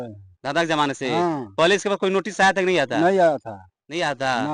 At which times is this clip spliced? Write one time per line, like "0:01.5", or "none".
none